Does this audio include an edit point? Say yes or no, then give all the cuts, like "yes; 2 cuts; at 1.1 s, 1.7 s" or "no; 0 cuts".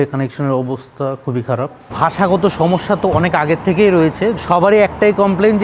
yes; 2 cuts; at 1.9 s, 4.4 s